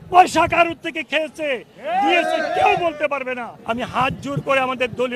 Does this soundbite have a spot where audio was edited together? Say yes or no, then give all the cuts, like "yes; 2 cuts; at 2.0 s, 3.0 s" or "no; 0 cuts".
yes; 1 cut; at 3.5 s